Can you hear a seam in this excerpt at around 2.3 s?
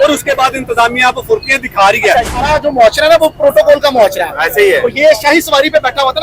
yes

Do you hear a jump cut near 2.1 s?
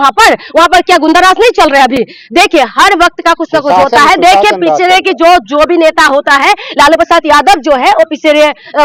no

